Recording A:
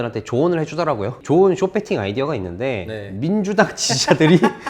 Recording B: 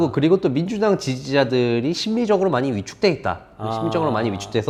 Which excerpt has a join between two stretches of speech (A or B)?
A